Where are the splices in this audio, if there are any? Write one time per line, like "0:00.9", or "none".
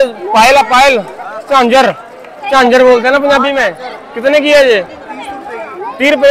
none